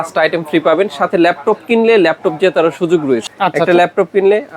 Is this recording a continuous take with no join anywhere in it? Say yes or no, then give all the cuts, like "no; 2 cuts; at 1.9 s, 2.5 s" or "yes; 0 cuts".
no; 1 cut; at 3.3 s